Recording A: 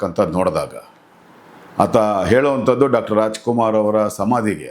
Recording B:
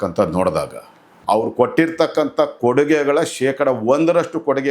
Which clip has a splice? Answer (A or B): B